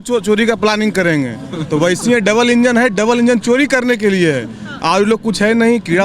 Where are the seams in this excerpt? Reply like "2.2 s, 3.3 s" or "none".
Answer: none